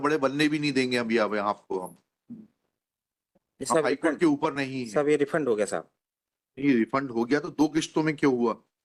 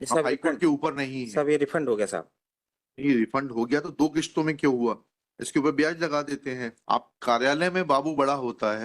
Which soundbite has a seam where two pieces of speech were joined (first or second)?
second